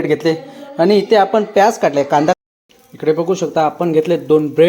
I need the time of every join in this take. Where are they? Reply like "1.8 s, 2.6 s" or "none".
2.4 s